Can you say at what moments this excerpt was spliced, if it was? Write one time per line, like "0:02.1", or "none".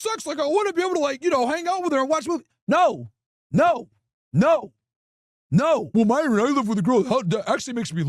0:05.9